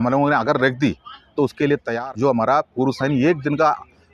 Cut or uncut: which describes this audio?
cut